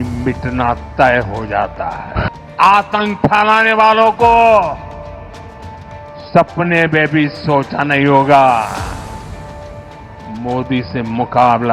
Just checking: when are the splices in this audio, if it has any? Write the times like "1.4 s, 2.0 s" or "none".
2.3 s, 4.8 s, 6.3 s